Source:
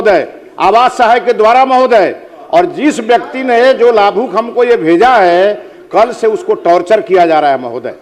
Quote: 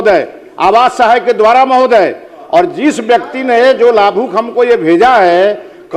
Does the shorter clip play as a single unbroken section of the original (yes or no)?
yes